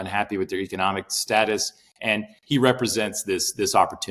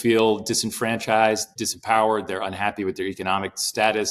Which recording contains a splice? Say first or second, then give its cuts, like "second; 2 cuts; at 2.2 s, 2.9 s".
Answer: second; 1 cut; at 1.5 s